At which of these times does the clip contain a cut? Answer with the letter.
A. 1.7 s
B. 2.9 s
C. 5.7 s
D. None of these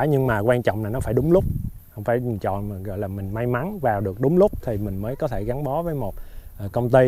A